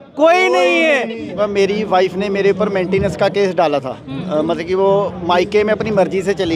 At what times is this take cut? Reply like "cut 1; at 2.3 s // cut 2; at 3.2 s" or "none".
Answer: cut 1; at 1.4 s